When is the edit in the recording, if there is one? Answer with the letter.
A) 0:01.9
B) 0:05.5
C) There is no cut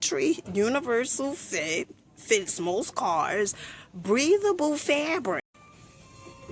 B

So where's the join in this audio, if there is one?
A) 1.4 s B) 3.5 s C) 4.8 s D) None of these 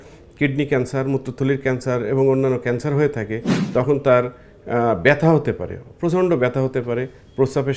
B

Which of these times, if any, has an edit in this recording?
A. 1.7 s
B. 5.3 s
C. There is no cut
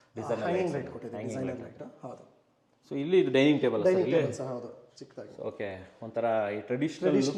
C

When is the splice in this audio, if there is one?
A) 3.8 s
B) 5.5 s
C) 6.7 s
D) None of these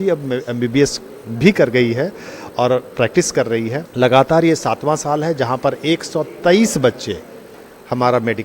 A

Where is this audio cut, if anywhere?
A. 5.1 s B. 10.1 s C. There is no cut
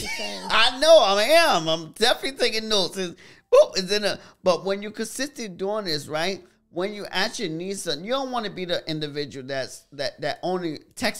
C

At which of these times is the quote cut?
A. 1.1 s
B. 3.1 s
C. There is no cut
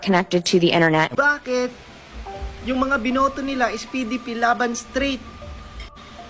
A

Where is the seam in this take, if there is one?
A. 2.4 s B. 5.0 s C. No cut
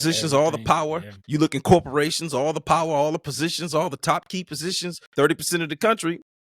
B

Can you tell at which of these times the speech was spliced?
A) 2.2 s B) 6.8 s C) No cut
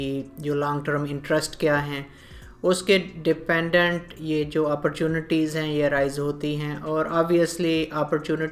C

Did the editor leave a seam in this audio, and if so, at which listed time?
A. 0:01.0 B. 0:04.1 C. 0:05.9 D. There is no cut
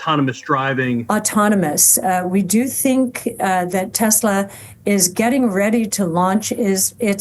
A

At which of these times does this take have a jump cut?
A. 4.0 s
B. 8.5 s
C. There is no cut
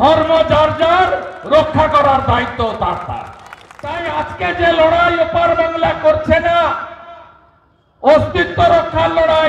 A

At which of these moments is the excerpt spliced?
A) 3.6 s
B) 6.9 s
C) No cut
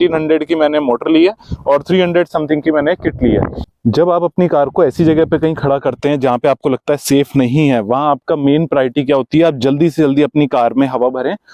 A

